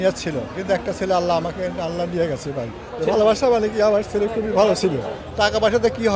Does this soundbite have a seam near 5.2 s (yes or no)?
yes